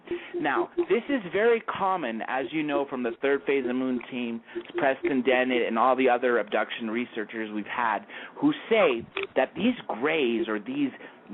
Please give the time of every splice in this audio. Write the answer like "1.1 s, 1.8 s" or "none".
none